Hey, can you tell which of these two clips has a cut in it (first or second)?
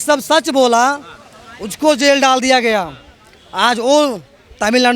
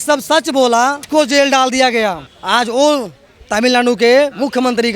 second